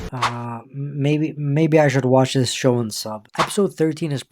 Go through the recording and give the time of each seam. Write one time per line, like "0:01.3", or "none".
0:03.2